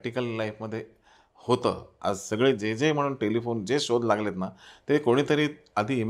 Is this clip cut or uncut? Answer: uncut